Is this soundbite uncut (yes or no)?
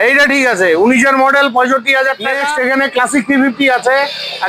no